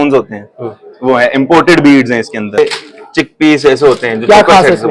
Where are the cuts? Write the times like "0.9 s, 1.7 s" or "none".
2.6 s